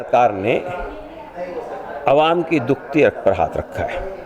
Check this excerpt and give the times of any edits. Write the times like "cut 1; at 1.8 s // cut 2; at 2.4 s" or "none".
none